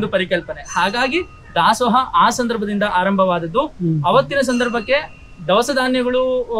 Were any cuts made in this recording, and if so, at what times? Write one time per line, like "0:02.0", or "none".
none

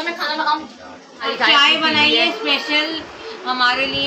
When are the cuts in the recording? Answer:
0:01.3

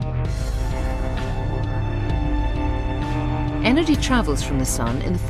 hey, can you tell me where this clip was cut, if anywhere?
0:02.4

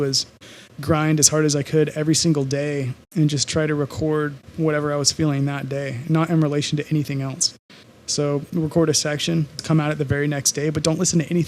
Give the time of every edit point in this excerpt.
0:03.0
0:09.6

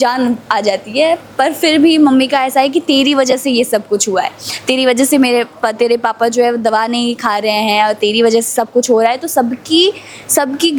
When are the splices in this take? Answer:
none

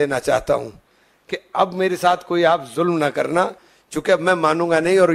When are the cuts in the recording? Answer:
none

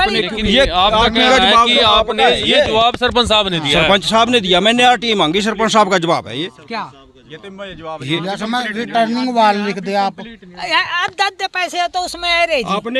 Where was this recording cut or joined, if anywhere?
none

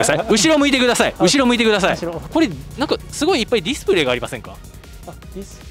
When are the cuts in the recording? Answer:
0:02.1

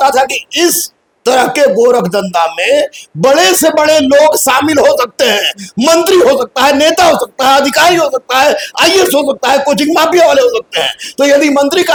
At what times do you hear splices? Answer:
none

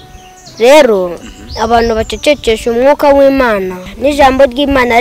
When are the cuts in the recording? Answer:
0:03.8

